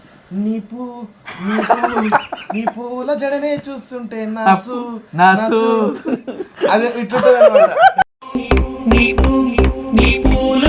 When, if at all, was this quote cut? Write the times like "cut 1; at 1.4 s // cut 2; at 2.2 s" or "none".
cut 1; at 8.0 s